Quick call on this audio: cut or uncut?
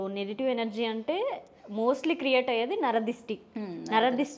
uncut